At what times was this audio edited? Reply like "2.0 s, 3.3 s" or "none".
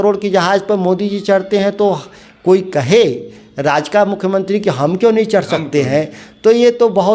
none